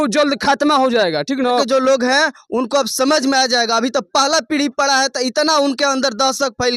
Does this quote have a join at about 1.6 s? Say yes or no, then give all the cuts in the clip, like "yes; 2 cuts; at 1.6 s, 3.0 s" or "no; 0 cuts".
yes; 1 cut; at 1.6 s